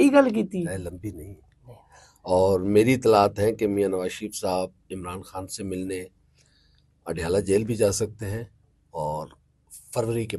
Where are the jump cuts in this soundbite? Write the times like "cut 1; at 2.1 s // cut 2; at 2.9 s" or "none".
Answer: none